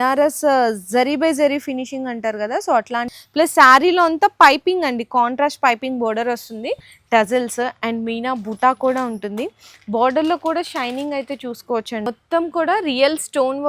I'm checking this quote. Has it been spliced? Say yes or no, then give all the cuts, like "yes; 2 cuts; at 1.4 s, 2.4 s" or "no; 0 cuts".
yes; 3 cuts; at 3.1 s, 6.9 s, 12.1 s